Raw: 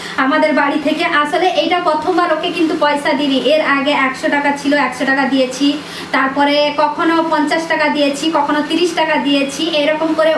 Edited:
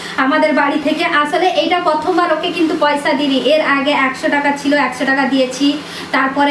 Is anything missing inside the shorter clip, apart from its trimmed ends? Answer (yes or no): no